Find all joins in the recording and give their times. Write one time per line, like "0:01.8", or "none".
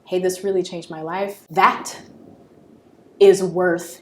0:01.4